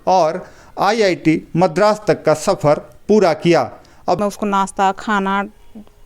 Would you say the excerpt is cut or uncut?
cut